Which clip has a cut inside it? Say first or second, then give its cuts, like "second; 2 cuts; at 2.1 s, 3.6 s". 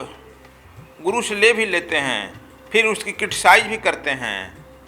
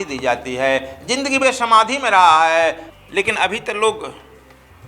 second; 1 cut; at 2.9 s